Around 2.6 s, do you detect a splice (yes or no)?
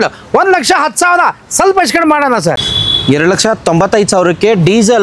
yes